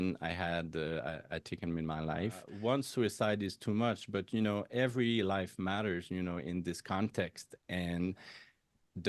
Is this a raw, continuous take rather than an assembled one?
no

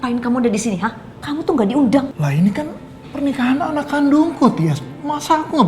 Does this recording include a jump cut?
yes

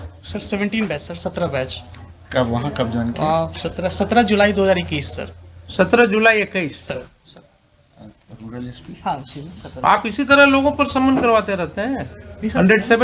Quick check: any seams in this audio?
no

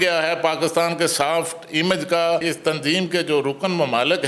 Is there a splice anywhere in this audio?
yes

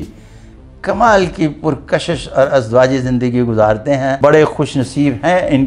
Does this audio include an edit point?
yes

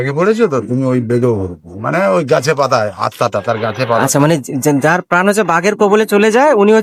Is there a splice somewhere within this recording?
no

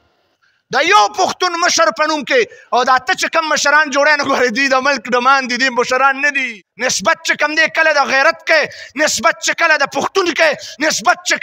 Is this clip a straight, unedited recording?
yes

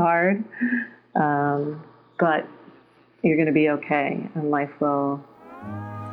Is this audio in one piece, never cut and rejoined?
yes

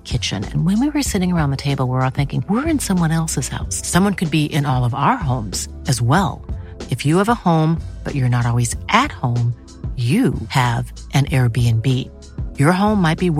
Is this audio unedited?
yes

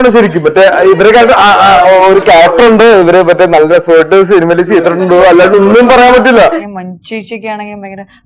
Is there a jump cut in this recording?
yes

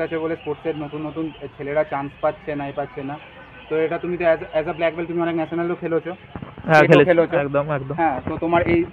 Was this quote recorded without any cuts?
yes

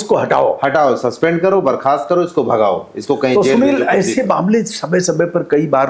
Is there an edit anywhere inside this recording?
no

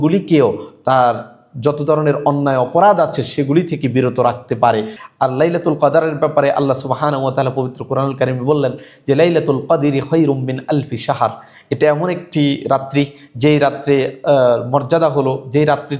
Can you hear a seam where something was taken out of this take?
yes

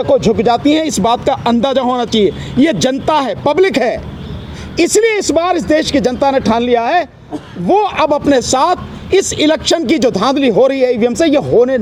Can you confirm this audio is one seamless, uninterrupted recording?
yes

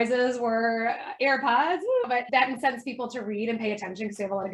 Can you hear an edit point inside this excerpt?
no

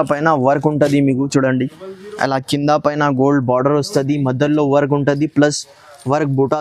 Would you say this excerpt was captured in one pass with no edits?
yes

